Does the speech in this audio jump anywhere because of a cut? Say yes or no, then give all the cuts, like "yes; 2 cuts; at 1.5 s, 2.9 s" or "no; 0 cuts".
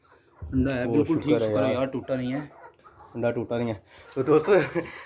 no; 0 cuts